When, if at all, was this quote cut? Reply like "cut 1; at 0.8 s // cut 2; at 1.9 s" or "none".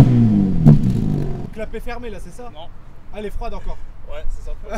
cut 1; at 1.5 s